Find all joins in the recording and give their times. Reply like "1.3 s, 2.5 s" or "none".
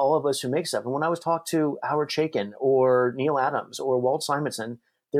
none